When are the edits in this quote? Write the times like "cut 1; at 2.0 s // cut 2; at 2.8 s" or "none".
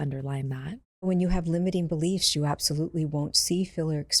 cut 1; at 1.1 s